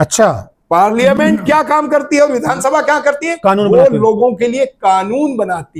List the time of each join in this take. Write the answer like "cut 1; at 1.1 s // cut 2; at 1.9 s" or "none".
none